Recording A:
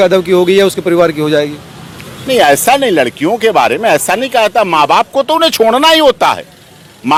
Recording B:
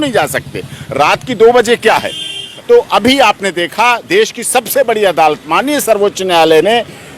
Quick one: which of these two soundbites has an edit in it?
B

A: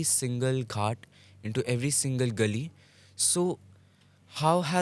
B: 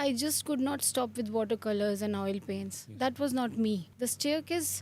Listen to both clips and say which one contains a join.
B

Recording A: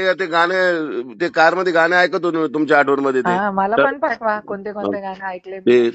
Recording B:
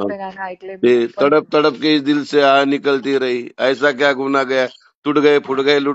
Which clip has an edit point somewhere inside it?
A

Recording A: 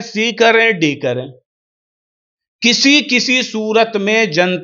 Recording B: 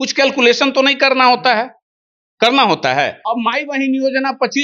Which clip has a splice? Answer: B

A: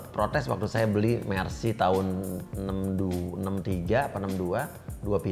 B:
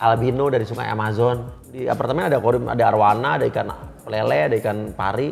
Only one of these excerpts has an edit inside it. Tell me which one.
B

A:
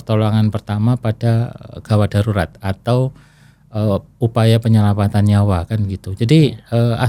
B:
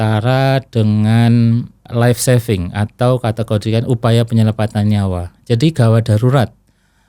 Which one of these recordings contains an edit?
B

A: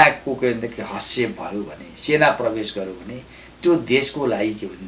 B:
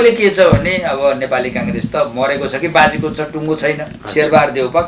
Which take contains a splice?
B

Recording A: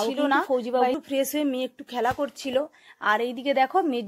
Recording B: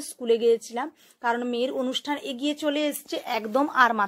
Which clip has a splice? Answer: A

